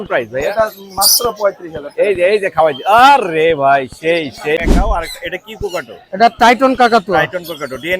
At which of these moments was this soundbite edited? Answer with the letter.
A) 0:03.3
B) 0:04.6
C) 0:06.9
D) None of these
B